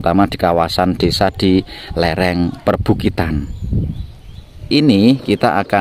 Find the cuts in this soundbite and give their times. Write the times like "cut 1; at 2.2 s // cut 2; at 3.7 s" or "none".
cut 1; at 4.7 s